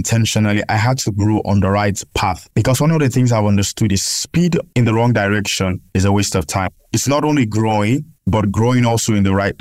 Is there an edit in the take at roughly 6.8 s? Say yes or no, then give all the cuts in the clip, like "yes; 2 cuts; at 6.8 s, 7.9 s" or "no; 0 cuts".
yes; 1 cut; at 6.8 s